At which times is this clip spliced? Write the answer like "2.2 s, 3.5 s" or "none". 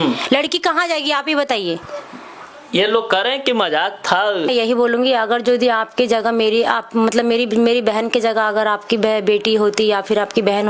4.5 s

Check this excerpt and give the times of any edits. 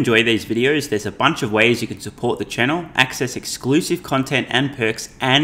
none

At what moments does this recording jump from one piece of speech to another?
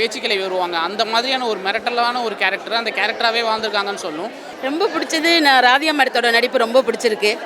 4.5 s

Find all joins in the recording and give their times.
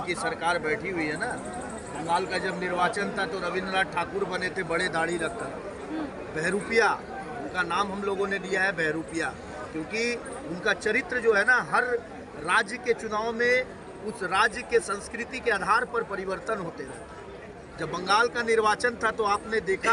none

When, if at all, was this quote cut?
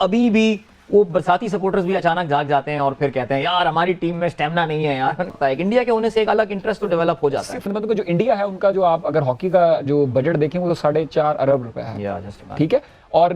5.2 s

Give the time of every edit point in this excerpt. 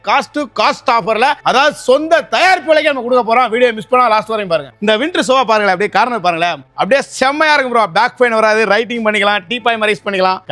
1.4 s, 4.7 s, 6.6 s

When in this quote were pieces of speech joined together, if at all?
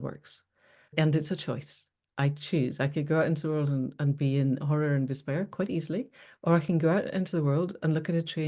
0.9 s

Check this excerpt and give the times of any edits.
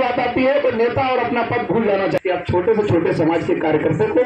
2.2 s

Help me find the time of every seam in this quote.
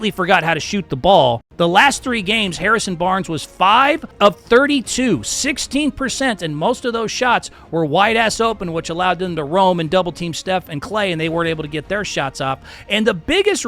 1.5 s, 4.1 s

